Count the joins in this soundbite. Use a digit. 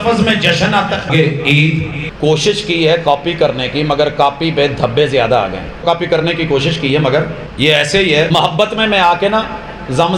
5